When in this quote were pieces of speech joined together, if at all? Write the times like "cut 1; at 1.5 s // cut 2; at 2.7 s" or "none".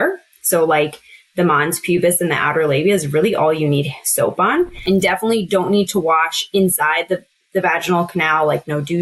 cut 1; at 4.8 s

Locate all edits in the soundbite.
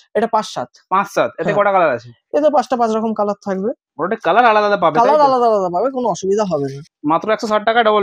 cut 1; at 6.9 s

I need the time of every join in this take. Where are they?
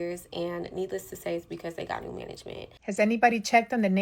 cut 1; at 2.8 s

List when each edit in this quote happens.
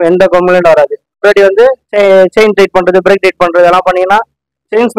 cut 1; at 1.2 s

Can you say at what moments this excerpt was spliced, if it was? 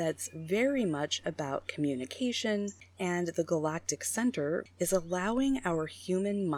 cut 1; at 2.8 s // cut 2; at 4.6 s

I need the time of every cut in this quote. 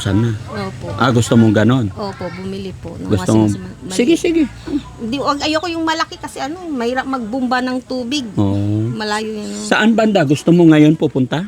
none

